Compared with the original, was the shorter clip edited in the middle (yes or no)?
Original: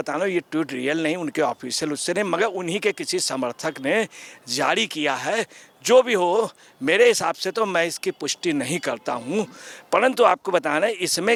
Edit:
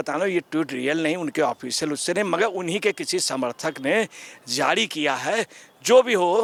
no